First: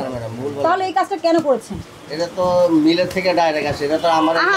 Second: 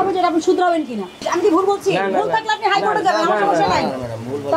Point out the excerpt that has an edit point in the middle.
second; 1 cut; at 1.3 s

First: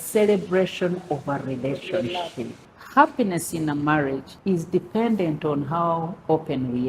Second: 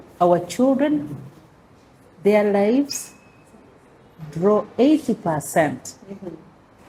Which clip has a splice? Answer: first; 2 cuts; at 2.6 s, 4.3 s

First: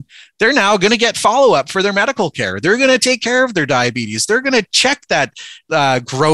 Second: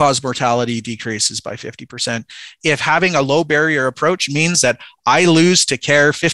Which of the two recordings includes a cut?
second; 1 cut; at 2.5 s

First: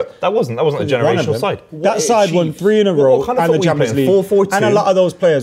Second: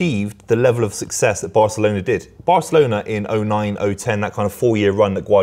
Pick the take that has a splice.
first; 1 cut; at 1.8 s

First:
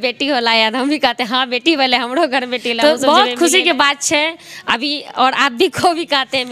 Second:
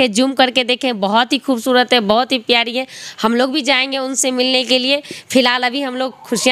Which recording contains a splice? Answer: first; 1 cut; at 2.7 s

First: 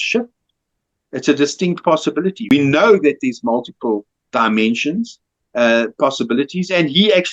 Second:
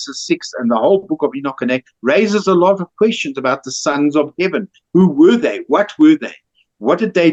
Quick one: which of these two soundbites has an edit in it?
first; 1 cut; at 2.5 s

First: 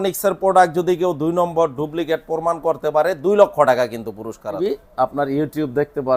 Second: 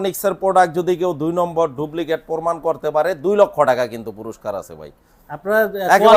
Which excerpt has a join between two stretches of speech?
first; 1 cut; at 4.6 s

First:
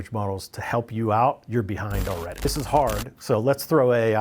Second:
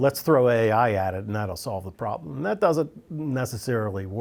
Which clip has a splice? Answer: first; 1 cut; at 2.4 s

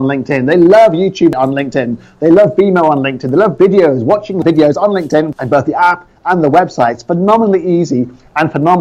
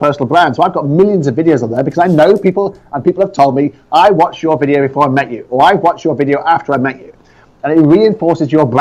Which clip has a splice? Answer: first; 3 cuts; at 1.3 s, 4.4 s, 5.4 s

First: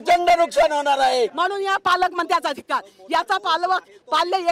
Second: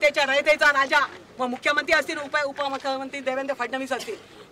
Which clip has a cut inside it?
first; 1 cut; at 1.3 s

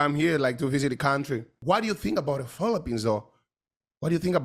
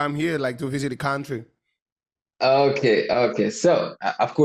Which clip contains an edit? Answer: first; 1 cut; at 1.5 s

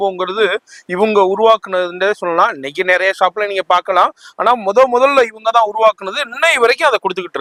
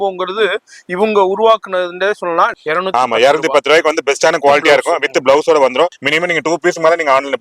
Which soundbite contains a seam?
second; 2 cuts; at 2.6 s, 6.0 s

